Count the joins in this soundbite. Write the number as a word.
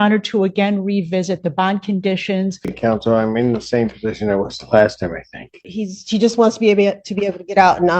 two